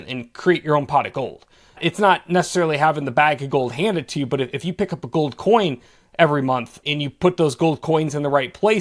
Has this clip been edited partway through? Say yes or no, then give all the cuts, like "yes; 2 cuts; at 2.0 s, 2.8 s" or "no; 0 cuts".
no; 0 cuts